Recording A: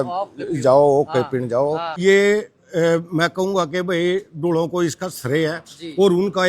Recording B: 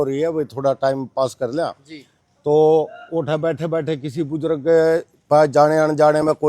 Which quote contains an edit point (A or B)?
A